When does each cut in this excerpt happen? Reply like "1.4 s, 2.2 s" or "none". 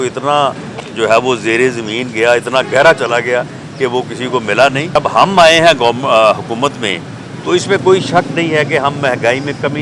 5.0 s